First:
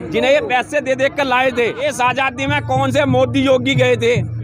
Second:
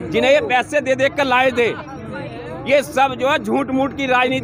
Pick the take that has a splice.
first; 1 cut; at 1.9 s

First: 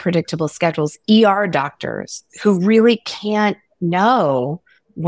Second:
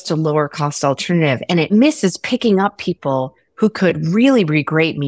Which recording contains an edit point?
second; 1 cut; at 1.7 s

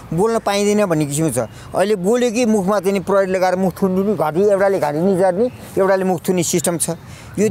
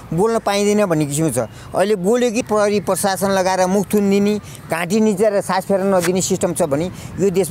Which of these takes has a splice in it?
second; 1 cut; at 2.4 s

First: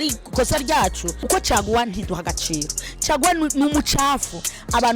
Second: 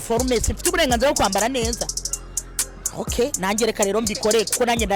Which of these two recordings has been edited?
first; 1 cut; at 1.1 s

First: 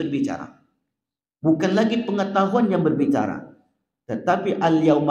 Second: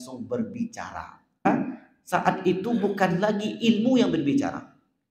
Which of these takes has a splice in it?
second; 1 cut; at 1.5 s

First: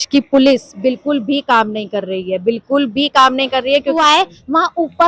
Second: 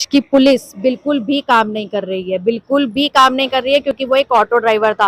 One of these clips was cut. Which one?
first; 1 cut; at 4.0 s

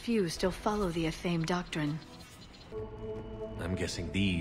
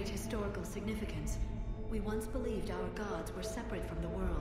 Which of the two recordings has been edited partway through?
first; 1 cut; at 2.7 s

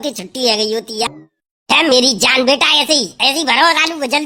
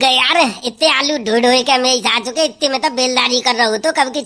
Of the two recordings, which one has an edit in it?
first; 1 cut; at 1.1 s

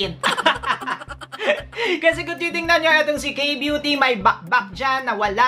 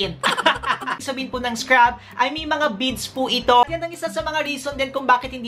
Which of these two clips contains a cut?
second; 2 cuts; at 1.0 s, 3.6 s

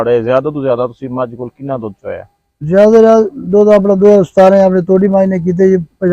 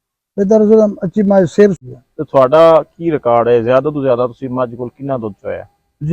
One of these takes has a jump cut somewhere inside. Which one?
second; 1 cut; at 1.8 s

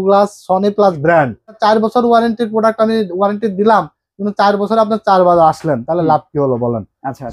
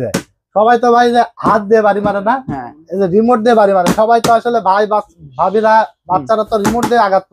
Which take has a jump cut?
first; 1 cut; at 1.6 s

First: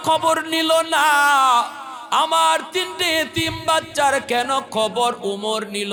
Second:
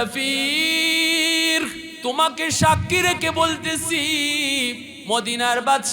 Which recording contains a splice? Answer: second; 2 cuts; at 1.8 s, 4.9 s

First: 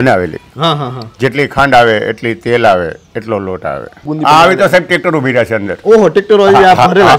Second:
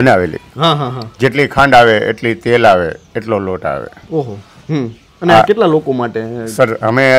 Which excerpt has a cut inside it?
first; 1 cut; at 4.1 s

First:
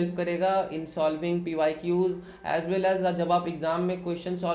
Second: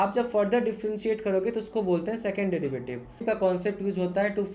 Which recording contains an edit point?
second; 1 cut; at 3.2 s

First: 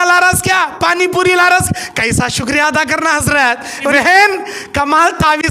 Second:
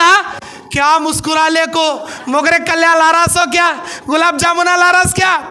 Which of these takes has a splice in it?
first; 1 cut; at 3.9 s

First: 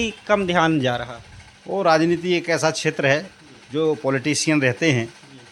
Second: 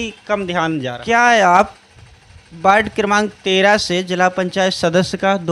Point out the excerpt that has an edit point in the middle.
second; 1 cut; at 0.9 s

